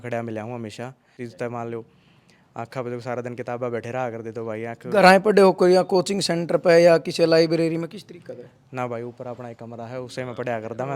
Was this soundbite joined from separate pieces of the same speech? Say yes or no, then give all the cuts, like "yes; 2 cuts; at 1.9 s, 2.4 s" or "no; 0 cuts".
yes; 1 cut; at 1.1 s